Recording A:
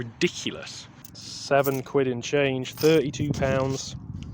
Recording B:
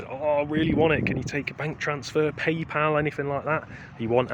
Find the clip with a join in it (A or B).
A